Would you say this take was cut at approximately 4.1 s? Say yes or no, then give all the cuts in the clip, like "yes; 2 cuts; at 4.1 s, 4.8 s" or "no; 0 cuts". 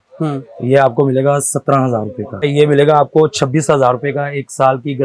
no; 1 cut; at 2.5 s